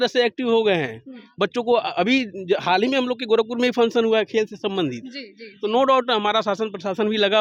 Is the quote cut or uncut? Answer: uncut